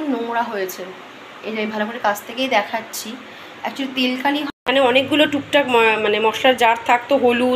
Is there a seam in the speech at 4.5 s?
yes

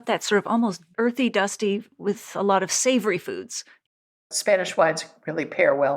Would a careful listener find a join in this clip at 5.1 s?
no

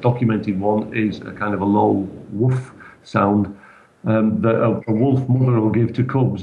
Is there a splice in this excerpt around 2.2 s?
no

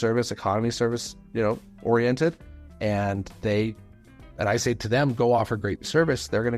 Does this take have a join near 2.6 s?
no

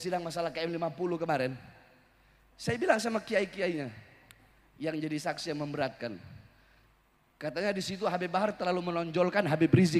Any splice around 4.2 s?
no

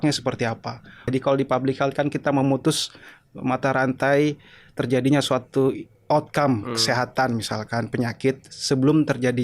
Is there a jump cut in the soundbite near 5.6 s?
no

